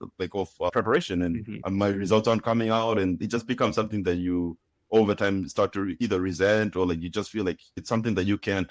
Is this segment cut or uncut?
cut